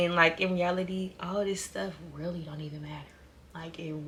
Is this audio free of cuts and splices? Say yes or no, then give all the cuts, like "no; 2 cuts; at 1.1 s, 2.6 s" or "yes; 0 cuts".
yes; 0 cuts